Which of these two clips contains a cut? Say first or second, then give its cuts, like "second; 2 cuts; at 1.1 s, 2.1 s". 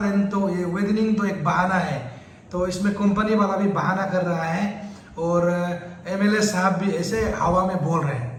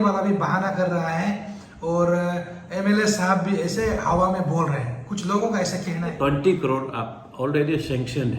second; 1 cut; at 6.1 s